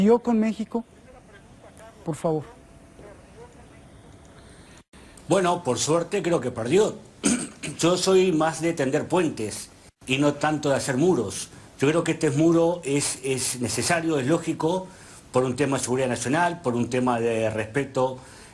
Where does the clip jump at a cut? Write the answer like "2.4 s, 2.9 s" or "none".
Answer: 8.5 s